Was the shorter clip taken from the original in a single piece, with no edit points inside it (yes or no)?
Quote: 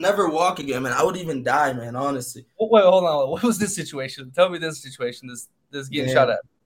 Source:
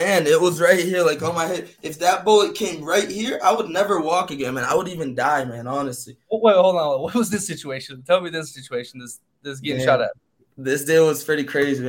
yes